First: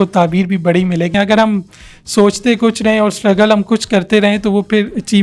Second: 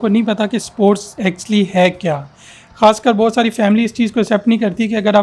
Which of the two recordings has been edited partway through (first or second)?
first